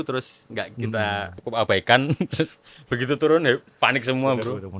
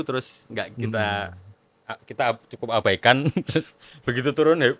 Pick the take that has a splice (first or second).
first